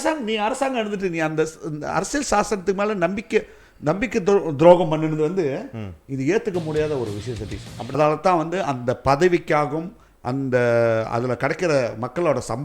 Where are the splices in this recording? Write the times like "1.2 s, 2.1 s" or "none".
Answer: 7.9 s